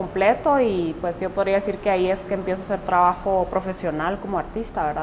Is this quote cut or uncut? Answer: cut